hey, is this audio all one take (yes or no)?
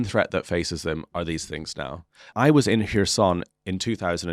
no